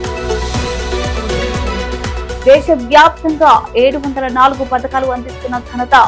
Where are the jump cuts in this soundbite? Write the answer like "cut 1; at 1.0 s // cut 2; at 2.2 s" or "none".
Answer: cut 1; at 2.0 s